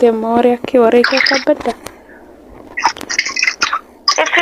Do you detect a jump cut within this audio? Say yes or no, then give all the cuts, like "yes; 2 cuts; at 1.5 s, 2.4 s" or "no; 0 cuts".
no; 0 cuts